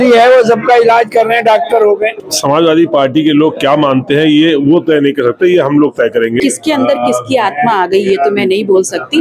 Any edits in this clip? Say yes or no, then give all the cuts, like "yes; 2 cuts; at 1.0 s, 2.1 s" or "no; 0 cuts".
yes; 2 cuts; at 2.2 s, 6.4 s